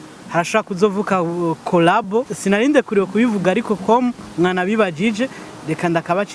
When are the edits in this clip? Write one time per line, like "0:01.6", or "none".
0:02.3